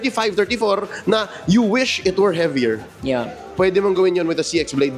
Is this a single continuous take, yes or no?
yes